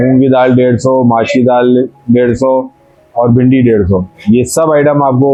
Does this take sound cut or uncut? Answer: uncut